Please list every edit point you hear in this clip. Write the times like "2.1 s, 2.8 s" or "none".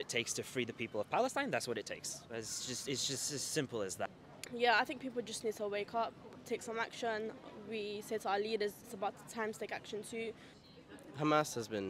4.1 s